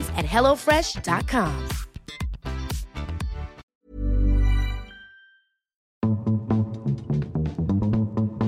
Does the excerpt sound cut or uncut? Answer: cut